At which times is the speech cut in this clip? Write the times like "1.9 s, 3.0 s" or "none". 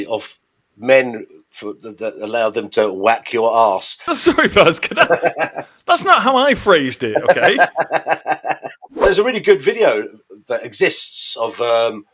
4.0 s, 9.0 s